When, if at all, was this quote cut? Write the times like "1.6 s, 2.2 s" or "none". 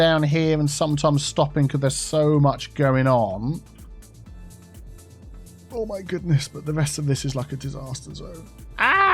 none